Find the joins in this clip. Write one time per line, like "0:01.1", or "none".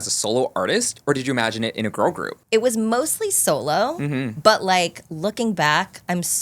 0:02.3